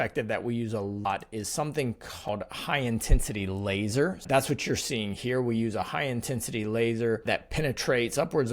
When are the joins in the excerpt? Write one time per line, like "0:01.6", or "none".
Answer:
0:01.1
0:02.3
0:04.2
0:07.2